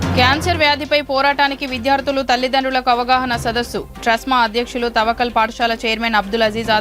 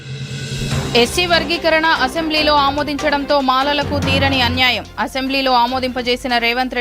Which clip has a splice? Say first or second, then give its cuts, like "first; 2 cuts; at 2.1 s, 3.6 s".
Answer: second; 1 cut; at 0.9 s